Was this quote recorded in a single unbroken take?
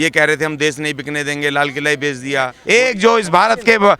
no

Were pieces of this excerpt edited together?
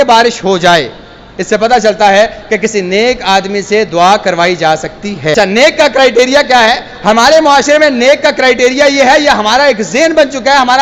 yes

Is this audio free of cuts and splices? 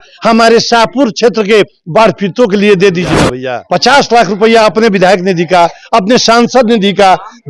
no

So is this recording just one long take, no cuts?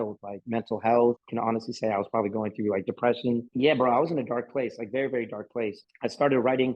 no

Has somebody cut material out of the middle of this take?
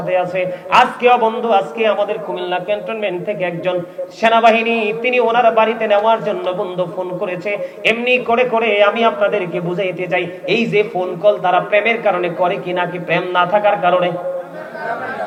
no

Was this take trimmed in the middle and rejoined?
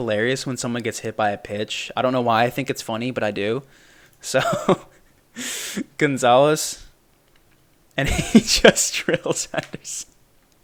no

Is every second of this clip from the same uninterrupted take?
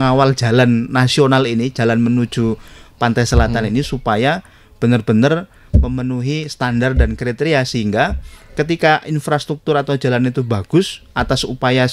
yes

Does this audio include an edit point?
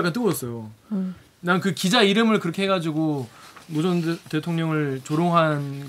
no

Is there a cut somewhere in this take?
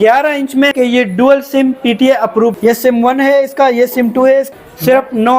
yes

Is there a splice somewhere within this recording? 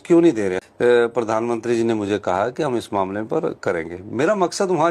yes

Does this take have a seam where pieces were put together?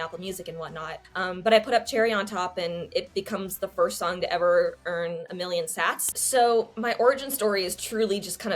yes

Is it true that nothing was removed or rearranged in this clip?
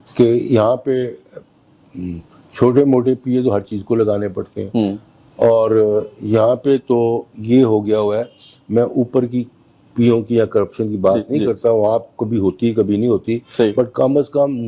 yes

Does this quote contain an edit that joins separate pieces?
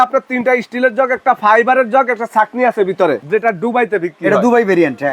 yes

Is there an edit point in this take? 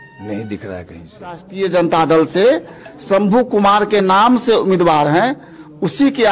yes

